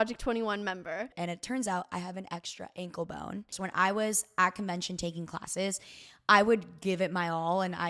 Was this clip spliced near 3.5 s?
yes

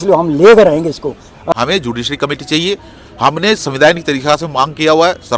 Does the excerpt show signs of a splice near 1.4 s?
yes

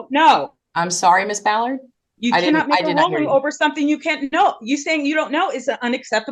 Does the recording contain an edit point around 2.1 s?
no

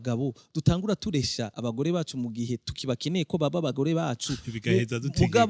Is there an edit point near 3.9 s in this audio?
no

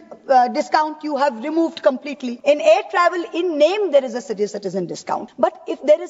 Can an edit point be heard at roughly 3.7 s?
no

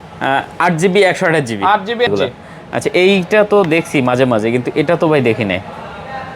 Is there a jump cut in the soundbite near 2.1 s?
yes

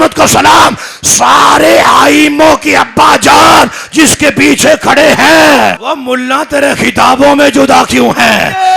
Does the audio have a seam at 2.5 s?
no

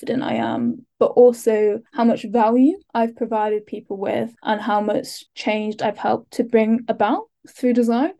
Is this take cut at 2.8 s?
yes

